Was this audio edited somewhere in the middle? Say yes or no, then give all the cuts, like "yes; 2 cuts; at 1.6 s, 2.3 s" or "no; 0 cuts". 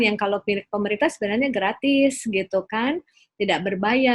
no; 0 cuts